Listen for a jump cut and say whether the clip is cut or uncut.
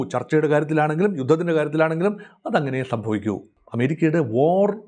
cut